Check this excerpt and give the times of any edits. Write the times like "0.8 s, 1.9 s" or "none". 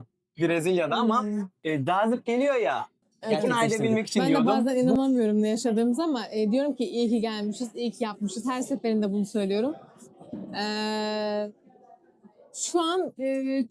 4.2 s